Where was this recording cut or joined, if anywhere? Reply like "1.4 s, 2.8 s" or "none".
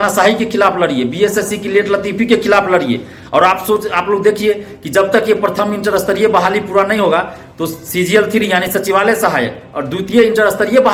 none